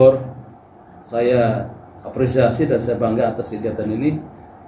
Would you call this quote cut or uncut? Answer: uncut